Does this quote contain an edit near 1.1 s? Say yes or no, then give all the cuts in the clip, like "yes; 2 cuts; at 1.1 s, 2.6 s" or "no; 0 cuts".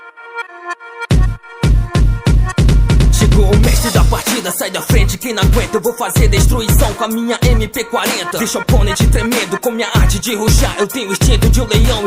yes; 1 cut; at 1.1 s